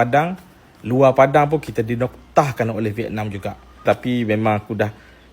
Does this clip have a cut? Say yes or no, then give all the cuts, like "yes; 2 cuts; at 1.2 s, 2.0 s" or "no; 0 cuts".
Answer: yes; 1 cut; at 3.8 s